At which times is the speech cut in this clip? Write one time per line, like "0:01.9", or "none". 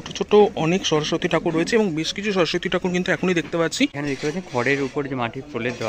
0:04.0